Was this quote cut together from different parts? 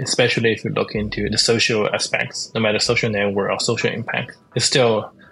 yes; 1 cut; at 1.3 s

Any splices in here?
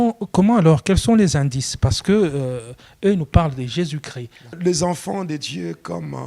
yes; 1 cut; at 4.6 s

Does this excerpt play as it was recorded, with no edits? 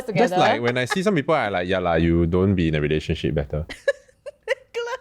yes; 0 cuts

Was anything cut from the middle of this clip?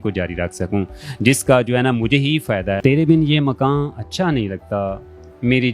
yes; 1 cut; at 2.8 s

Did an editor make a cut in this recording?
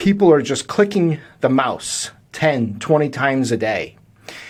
no; 0 cuts

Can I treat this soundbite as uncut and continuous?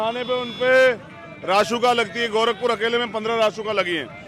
yes; 0 cuts

